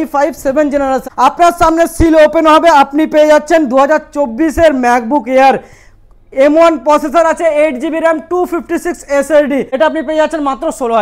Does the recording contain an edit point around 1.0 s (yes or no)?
yes